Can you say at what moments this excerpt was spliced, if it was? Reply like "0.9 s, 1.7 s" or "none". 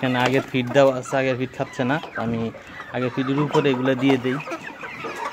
none